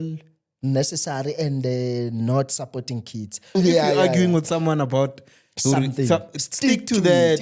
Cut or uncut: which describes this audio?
cut